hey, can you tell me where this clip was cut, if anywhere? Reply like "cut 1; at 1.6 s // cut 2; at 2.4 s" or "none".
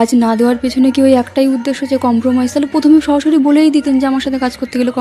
none